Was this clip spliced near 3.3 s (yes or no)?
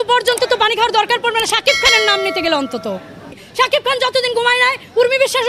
yes